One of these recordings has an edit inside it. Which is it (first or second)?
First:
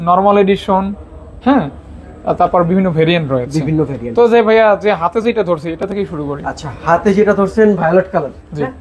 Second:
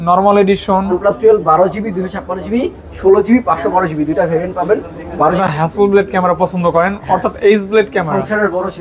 second